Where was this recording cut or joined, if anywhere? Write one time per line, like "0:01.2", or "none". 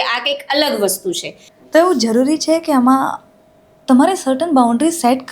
0:01.3